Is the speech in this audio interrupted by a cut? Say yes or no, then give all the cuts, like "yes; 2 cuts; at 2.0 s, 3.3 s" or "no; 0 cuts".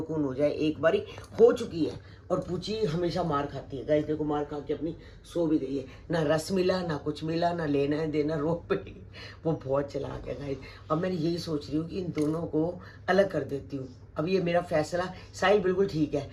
no; 0 cuts